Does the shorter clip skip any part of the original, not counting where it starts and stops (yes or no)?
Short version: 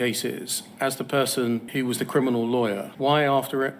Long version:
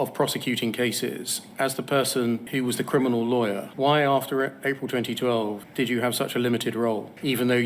no